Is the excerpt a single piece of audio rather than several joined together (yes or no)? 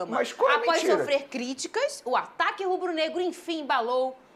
yes